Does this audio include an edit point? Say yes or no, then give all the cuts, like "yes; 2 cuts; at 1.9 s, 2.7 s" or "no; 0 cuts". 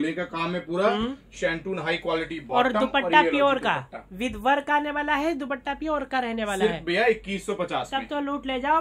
no; 0 cuts